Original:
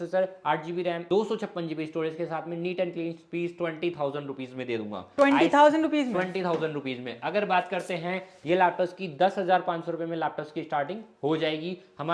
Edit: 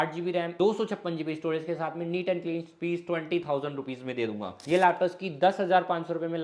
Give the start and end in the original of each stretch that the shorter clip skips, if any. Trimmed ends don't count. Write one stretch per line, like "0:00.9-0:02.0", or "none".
0:05.0-0:08.3